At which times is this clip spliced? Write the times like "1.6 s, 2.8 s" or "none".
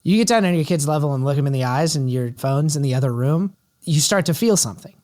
1.4 s, 2.3 s, 3.7 s